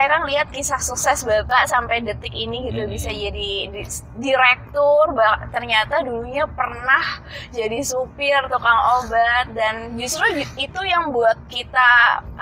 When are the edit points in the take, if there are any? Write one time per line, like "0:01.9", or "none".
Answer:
none